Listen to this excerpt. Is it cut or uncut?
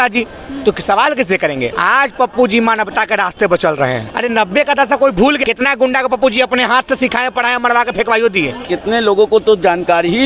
cut